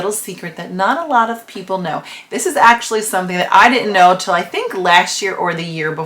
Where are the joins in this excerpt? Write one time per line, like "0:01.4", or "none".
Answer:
none